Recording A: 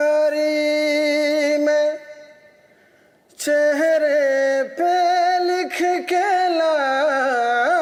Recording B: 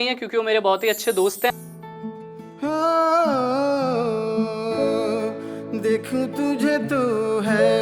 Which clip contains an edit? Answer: B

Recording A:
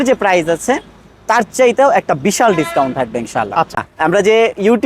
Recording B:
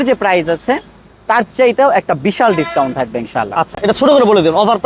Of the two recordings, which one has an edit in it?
A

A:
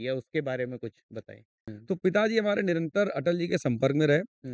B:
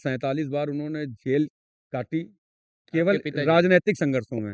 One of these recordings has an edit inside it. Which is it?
A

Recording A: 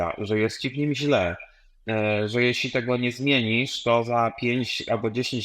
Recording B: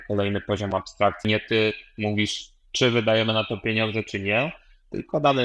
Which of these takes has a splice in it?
B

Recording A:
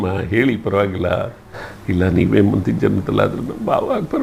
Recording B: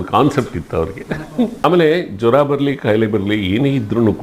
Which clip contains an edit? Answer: B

